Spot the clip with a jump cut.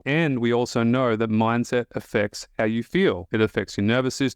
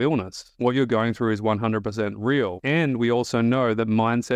first; 1 cut; at 3.2 s

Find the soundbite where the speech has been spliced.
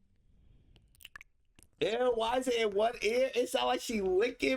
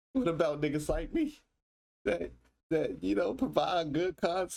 first; 1 cut; at 1.8 s

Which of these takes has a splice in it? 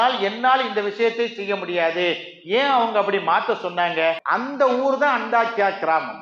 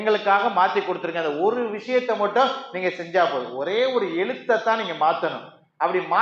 first; 1 cut; at 4.8 s

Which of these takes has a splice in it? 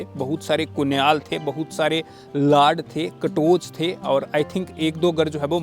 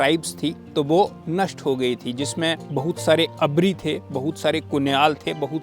second; 2 cuts; at 1.2 s, 2.6 s

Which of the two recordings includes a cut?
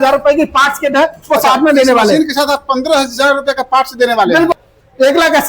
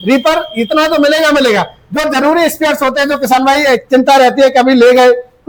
first; 1 cut; at 4.5 s

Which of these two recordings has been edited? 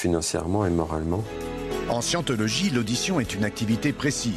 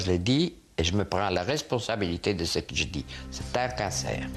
first; 1 cut; at 1.0 s

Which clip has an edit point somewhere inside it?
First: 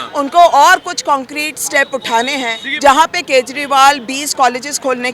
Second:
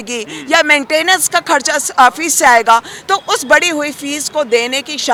first; 1 cut; at 2.6 s

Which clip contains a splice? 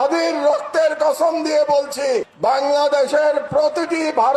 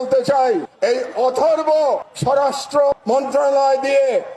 second; 2 cuts; at 2.1 s, 2.9 s

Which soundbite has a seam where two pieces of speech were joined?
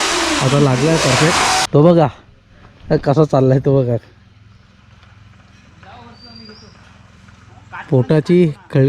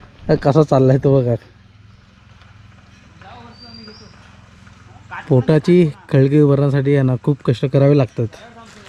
first; 1 cut; at 1.6 s

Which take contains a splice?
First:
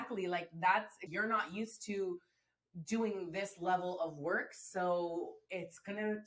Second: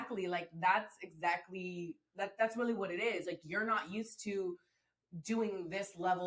first; 1 cut; at 1.1 s

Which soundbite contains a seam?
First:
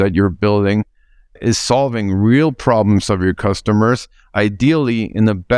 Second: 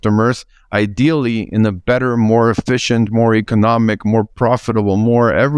first; 1 cut; at 1.4 s

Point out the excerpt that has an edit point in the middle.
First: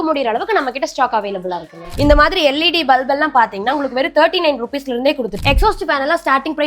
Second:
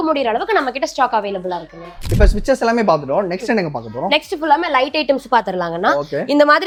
first; 2 cuts; at 1.9 s, 5.3 s

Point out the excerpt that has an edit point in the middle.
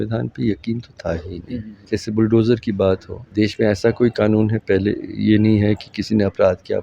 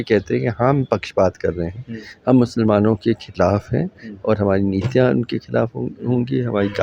first; 2 cuts; at 1.7 s, 3.2 s

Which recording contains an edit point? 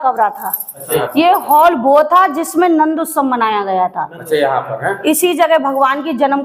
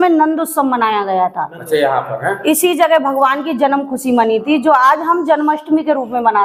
first; 1 cut; at 1.0 s

